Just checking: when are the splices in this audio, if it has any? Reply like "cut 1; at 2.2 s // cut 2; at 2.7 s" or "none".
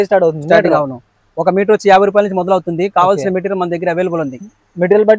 none